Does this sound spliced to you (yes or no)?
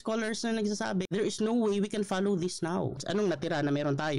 yes